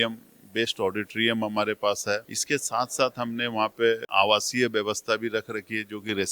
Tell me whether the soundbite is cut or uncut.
cut